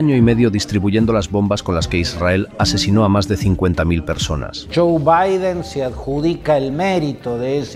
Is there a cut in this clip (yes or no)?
yes